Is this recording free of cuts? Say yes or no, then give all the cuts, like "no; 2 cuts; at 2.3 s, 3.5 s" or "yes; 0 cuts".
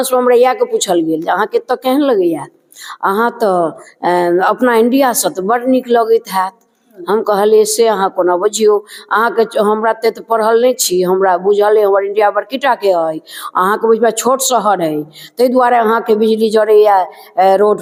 yes; 0 cuts